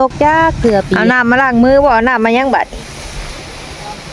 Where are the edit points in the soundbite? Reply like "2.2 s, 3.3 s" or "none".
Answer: 0.9 s